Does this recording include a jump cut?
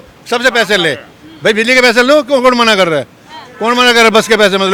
no; 0 cuts

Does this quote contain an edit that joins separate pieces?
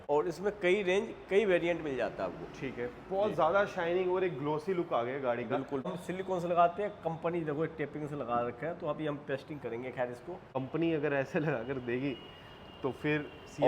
yes; 2 cuts; at 6.0 s, 10.6 s

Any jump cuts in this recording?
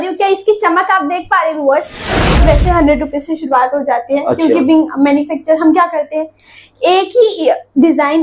yes; 1 cut; at 2.4 s

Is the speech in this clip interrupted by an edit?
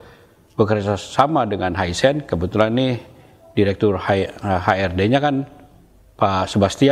no; 0 cuts

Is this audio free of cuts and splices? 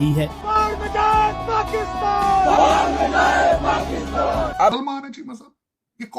no; 1 cut; at 4.7 s

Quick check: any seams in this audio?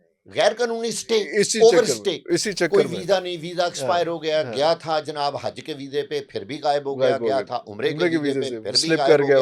no; 0 cuts

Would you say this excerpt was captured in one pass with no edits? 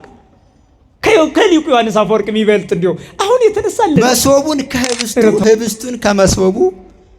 no; 1 cut; at 4.0 s

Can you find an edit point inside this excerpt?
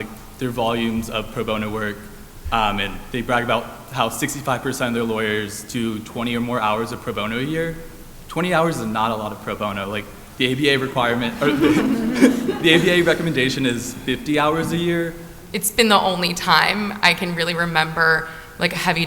yes; 1 cut; at 15.3 s

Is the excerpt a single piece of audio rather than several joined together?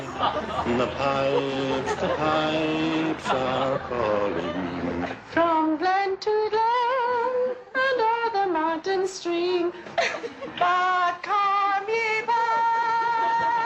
yes; 0 cuts

